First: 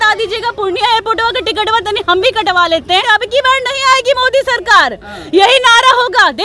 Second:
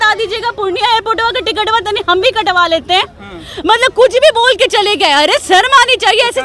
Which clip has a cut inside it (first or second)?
first